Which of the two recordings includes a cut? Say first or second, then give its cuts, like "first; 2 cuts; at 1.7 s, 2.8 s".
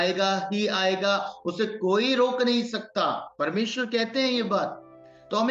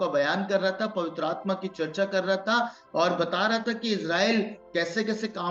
first; 1 cut; at 3.3 s